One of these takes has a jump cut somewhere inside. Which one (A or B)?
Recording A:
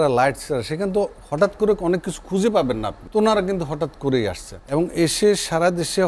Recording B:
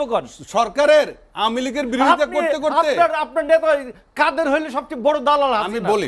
A